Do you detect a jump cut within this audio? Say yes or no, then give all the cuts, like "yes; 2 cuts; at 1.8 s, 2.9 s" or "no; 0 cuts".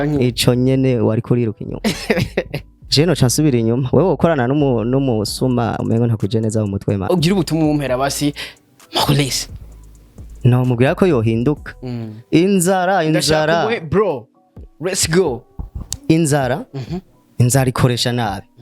yes; 2 cuts; at 2.7 s, 7.0 s